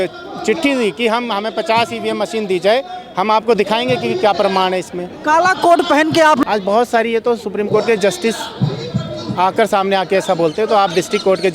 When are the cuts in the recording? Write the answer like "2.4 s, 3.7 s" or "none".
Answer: 6.4 s